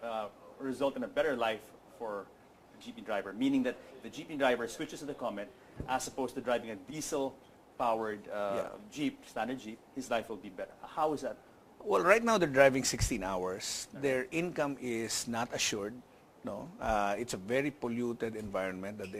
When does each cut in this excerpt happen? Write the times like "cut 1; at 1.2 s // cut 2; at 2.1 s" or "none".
none